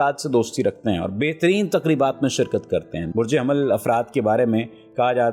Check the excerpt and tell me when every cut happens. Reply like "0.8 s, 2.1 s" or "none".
3.0 s